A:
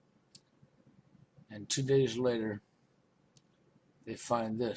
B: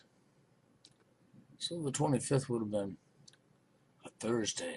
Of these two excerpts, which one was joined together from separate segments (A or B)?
A